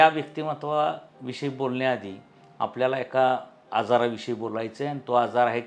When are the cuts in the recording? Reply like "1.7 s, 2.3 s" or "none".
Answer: none